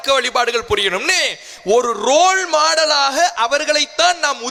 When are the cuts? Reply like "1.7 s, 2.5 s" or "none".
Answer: none